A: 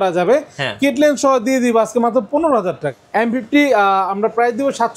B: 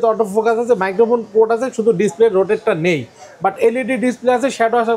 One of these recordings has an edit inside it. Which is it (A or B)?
A